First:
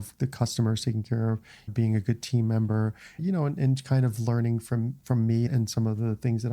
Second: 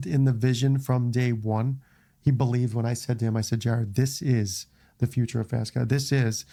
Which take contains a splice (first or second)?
first